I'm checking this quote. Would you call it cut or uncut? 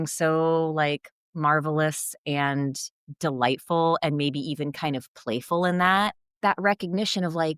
cut